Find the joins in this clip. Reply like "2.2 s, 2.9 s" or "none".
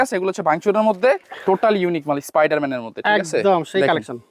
1.3 s